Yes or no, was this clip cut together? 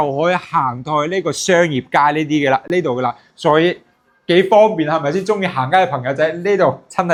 no